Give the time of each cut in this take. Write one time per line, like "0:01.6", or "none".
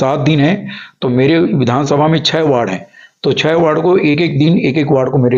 none